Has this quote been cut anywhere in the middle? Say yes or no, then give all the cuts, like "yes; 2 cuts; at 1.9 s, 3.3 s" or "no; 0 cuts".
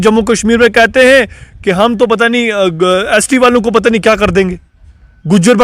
no; 0 cuts